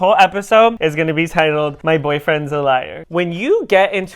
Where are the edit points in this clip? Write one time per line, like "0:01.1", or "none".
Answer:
0:00.8
0:01.8
0:03.0